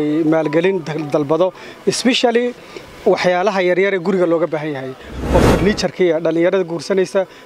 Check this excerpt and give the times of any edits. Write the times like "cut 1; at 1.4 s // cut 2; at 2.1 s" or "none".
cut 1; at 5.1 s